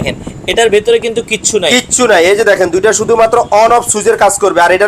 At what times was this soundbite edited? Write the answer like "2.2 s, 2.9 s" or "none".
none